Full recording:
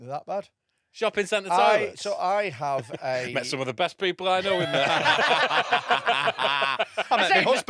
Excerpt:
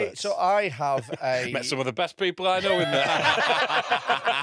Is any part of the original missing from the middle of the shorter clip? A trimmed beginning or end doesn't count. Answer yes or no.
no